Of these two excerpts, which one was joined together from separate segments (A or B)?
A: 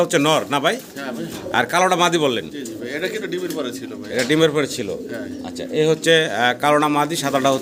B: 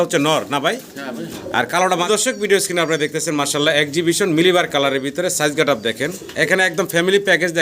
B